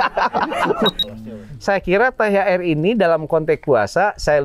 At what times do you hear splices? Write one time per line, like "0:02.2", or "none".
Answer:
0:01.0